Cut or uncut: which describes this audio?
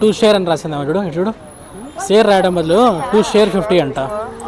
uncut